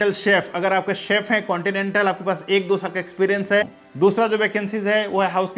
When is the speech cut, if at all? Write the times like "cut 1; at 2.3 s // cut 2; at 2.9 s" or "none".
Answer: cut 1; at 3.8 s